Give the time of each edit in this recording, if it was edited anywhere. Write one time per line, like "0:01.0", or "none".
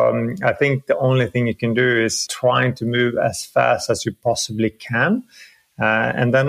0:02.2